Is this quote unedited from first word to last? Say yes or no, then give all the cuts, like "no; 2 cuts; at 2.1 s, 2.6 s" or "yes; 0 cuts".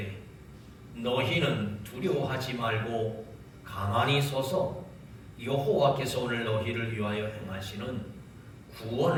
yes; 0 cuts